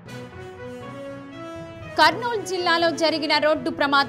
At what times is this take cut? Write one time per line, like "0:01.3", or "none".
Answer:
0:00.9